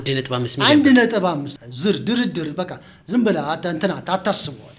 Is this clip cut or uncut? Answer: cut